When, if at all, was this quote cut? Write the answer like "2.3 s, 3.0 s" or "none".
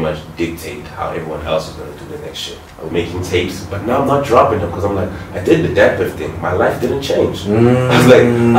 2.9 s

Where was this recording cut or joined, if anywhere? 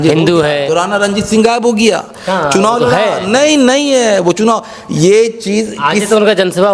none

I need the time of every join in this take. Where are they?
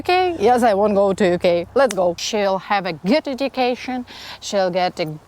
2.2 s

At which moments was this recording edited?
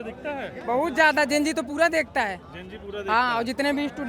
none

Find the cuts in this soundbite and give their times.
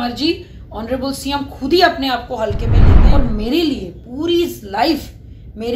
2.9 s

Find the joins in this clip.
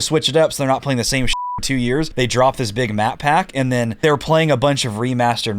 2.1 s, 3.9 s

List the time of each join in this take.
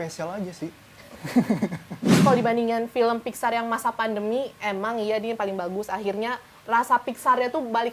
2.2 s

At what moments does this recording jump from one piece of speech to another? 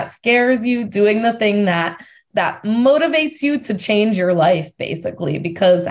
2.2 s

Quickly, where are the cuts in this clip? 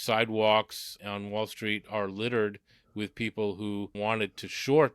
1.0 s, 3.9 s

